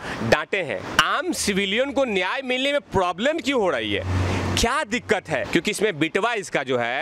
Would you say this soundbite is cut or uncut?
cut